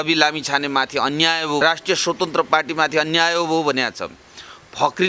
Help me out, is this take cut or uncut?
cut